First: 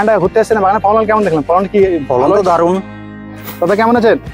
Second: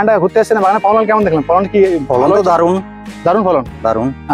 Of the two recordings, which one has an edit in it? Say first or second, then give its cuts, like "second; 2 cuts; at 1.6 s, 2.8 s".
first; 1 cut; at 3.1 s